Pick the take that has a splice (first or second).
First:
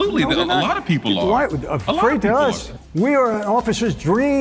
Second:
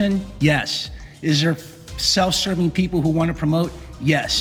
first